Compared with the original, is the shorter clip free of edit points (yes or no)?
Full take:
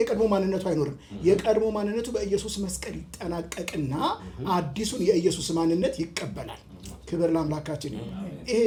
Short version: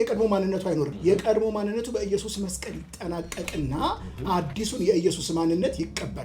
no